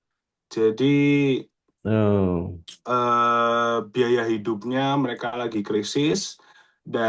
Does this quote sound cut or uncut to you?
uncut